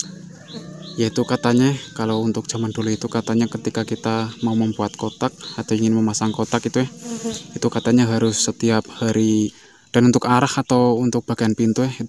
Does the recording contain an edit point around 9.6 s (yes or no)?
yes